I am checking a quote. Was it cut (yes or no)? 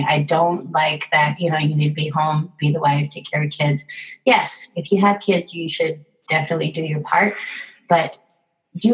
no